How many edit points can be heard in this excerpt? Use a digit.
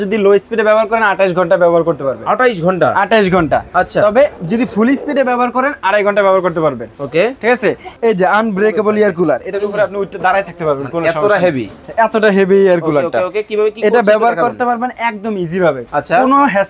1